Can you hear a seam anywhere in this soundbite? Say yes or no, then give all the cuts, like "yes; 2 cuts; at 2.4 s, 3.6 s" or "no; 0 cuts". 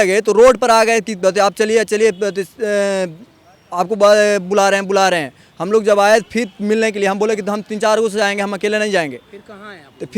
no; 0 cuts